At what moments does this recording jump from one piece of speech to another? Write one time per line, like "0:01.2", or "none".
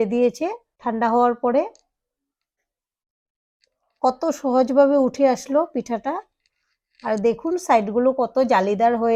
none